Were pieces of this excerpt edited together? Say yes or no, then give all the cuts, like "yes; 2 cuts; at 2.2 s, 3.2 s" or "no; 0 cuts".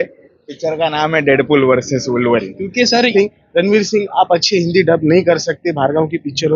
yes; 1 cut; at 3.1 s